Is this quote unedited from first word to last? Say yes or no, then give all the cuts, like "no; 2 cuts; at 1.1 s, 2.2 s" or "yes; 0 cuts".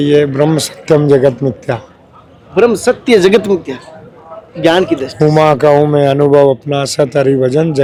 yes; 0 cuts